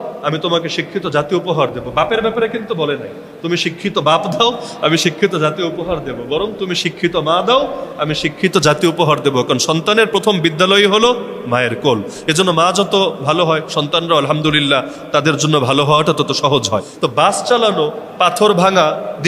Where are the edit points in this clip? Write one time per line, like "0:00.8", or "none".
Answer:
0:16.9